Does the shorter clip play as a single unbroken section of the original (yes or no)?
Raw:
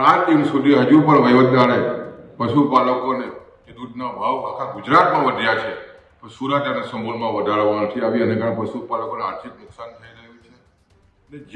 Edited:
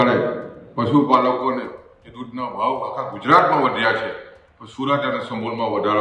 yes